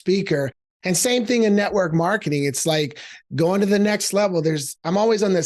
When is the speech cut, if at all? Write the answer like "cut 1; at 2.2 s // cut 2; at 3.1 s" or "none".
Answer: none